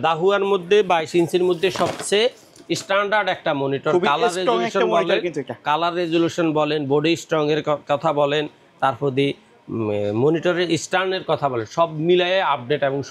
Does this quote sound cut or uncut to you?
uncut